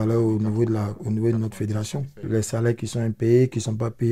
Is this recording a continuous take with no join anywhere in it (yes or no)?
no